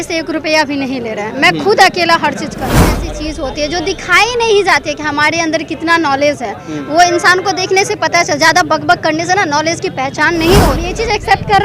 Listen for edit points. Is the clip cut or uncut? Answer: cut